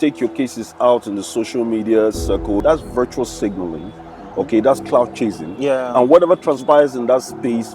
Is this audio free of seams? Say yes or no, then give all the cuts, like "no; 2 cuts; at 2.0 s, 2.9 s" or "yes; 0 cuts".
no; 1 cut; at 2.6 s